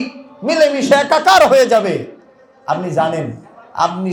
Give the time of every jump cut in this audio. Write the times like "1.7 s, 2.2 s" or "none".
none